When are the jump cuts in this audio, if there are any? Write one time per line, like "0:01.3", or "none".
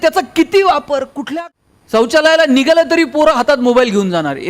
0:01.2

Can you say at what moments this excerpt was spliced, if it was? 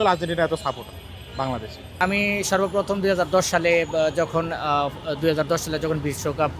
0:01.8

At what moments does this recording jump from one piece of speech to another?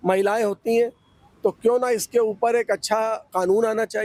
none

